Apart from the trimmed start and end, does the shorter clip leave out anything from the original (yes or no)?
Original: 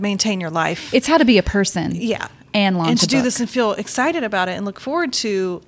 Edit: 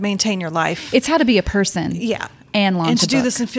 no